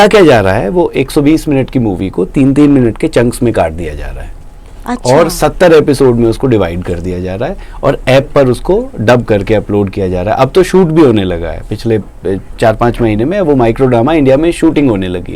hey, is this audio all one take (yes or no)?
yes